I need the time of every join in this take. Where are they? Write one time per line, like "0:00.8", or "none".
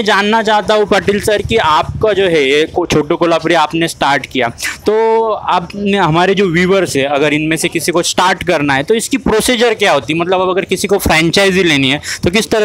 none